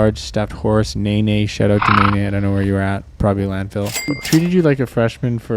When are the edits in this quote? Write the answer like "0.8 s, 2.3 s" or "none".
4.1 s